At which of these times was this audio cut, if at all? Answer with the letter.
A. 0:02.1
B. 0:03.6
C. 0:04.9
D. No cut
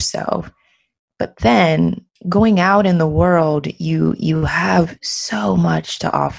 A